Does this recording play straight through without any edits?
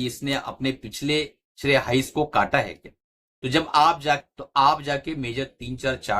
no; 2 cuts; at 1.5 s, 4.3 s

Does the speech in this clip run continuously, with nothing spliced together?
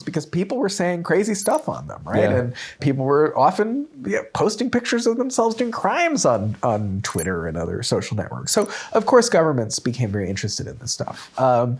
no; 1 cut; at 2.8 s

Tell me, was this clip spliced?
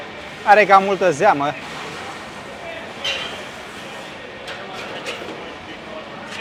no; 0 cuts

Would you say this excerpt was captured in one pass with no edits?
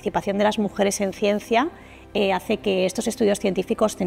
yes; 0 cuts

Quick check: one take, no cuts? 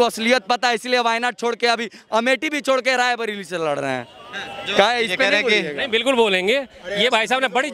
yes; 0 cuts

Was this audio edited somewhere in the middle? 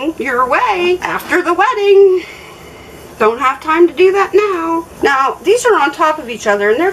no; 0 cuts

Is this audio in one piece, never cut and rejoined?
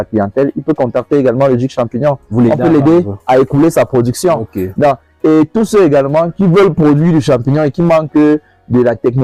yes; 0 cuts

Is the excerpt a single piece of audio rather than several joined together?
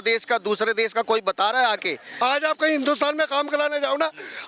no; 1 cut; at 2.0 s

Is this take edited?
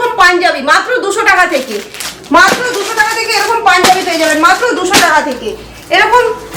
no; 0 cuts

